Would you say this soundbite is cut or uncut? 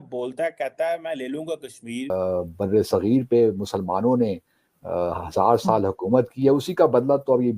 cut